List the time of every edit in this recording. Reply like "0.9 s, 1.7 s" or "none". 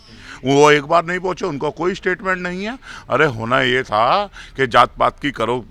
none